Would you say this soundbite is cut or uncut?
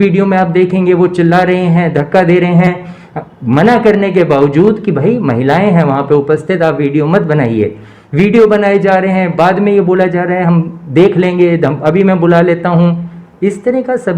uncut